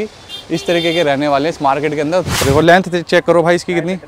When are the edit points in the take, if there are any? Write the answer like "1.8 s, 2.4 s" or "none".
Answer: 2.3 s